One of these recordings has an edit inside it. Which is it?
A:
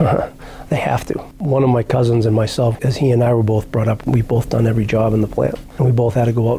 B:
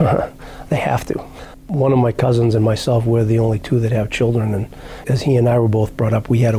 A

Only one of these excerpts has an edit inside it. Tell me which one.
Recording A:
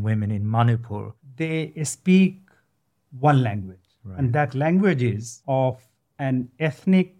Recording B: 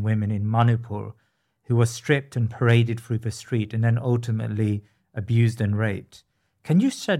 A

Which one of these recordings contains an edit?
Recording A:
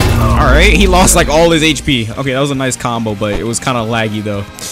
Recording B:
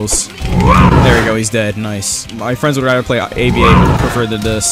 B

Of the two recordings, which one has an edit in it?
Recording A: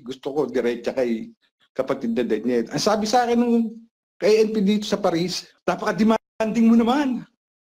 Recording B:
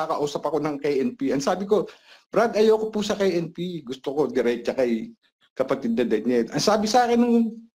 A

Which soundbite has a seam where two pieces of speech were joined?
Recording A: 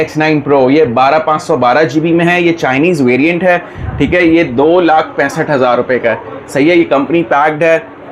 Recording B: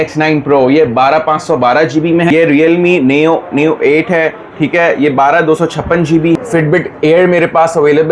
B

